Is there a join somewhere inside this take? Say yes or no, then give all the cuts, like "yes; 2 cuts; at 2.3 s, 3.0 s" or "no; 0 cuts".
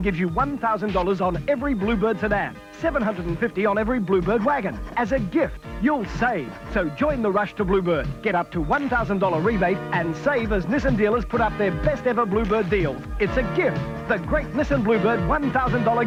no; 0 cuts